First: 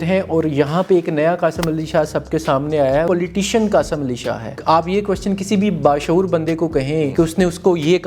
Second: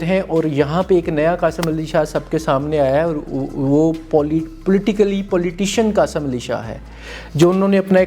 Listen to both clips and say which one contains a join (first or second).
first